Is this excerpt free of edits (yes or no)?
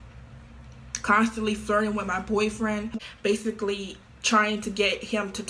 no